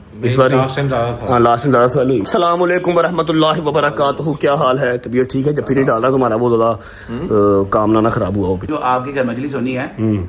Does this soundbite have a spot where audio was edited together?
yes; 2 cuts; at 2.3 s, 8.7 s

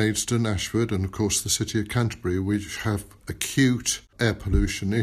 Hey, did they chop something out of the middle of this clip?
yes; 1 cut; at 4.1 s

